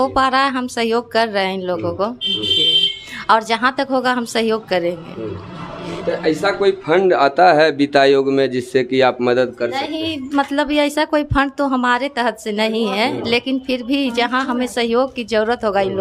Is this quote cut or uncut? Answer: uncut